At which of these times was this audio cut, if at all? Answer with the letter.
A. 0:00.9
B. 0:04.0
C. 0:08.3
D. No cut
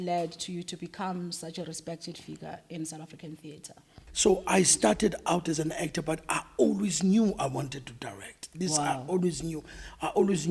B